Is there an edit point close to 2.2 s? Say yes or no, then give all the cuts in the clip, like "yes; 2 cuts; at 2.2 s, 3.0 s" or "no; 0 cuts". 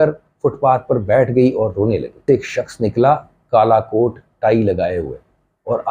yes; 1 cut; at 2.2 s